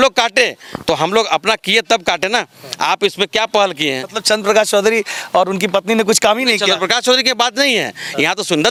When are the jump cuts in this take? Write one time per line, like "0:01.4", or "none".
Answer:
none